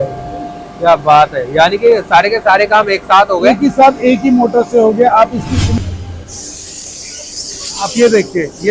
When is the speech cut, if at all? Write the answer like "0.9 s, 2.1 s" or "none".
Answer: 5.8 s